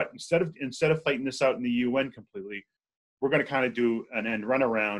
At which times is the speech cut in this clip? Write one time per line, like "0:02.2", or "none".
none